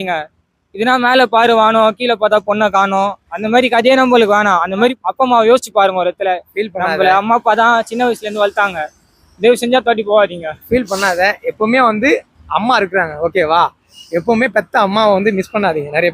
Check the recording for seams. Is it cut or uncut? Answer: cut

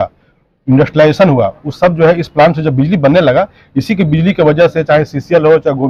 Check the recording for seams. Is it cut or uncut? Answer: uncut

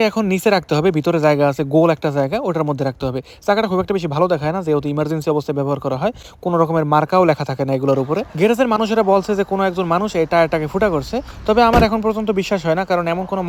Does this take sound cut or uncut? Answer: uncut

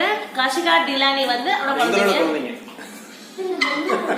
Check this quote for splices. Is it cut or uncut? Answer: cut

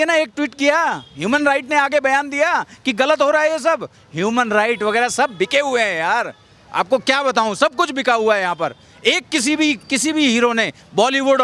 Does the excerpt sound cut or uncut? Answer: uncut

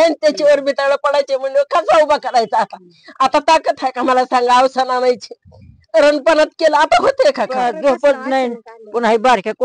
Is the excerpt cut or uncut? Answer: cut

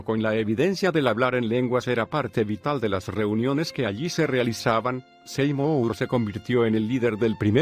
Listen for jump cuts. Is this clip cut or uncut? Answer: cut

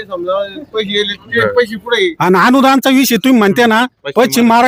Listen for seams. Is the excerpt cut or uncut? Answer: uncut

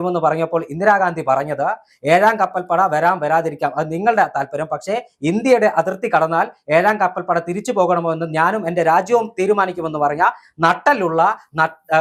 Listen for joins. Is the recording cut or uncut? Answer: uncut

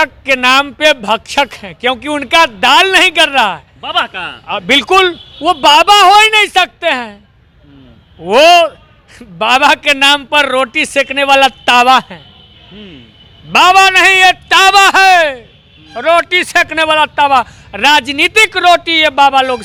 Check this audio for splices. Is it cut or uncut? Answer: uncut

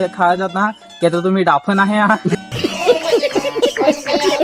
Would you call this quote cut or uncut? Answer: uncut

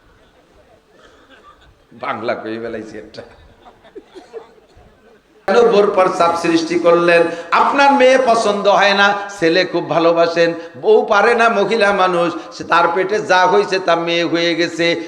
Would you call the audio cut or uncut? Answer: cut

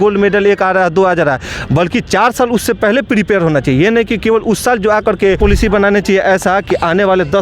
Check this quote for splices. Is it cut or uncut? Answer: cut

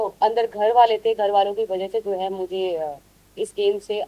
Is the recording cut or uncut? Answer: uncut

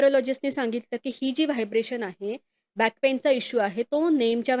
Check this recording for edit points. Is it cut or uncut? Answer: uncut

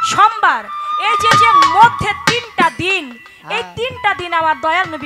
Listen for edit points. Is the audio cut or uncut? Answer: uncut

